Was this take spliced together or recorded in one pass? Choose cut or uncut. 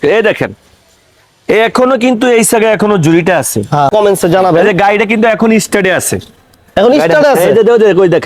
cut